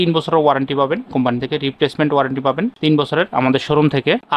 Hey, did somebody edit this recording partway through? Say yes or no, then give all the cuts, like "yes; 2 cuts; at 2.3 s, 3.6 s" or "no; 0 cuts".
no; 0 cuts